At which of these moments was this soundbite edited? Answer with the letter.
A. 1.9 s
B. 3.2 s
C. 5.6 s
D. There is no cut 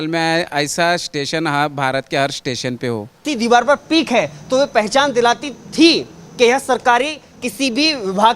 B